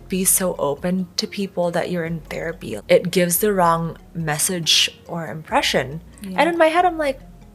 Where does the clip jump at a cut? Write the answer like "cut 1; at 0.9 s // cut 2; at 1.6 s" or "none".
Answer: none